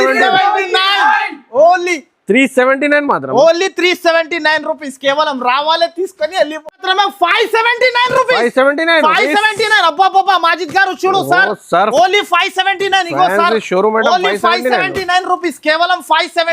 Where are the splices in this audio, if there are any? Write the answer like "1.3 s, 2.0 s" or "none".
6.8 s

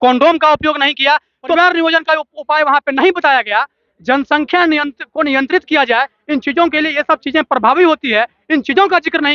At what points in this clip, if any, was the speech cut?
1.0 s

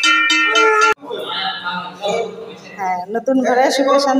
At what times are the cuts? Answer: 0.9 s

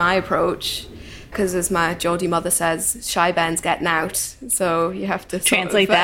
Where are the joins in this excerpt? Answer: 1.3 s

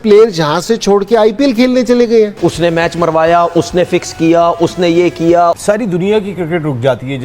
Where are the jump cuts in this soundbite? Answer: 2.3 s, 5.6 s

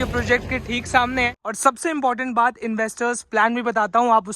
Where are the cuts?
1.4 s

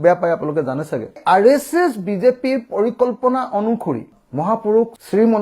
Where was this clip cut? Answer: 1.1 s

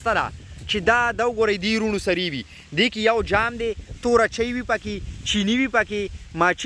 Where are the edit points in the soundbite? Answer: none

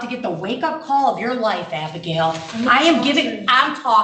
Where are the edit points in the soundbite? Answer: none

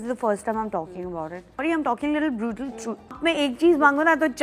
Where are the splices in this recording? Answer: 1.6 s, 3.2 s

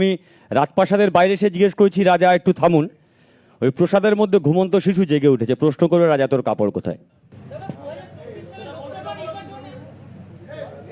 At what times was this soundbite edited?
none

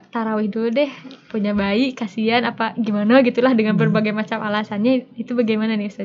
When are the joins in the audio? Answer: none

